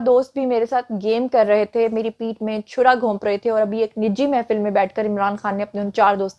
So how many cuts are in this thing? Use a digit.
0